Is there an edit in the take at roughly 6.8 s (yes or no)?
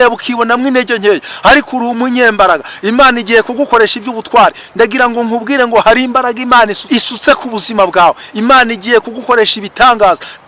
yes